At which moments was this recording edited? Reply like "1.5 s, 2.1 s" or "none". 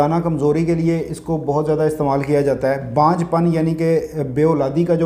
none